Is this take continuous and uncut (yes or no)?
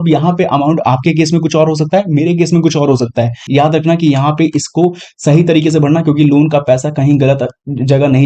no